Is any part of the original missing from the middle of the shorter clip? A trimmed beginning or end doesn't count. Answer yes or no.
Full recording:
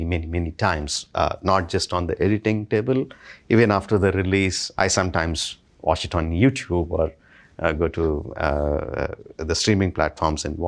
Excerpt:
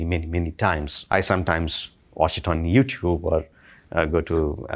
yes